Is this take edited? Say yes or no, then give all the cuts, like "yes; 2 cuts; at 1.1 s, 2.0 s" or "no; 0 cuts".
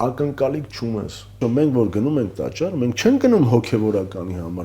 yes; 1 cut; at 1.4 s